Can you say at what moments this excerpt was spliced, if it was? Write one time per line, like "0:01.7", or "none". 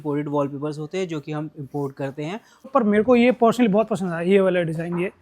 0:02.7